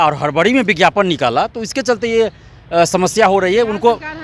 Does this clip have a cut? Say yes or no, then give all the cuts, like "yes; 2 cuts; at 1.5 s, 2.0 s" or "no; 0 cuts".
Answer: no; 0 cuts